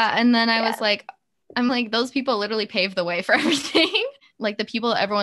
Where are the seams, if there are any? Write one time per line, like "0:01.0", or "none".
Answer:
none